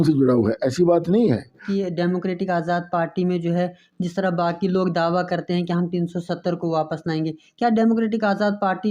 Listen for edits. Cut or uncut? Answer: cut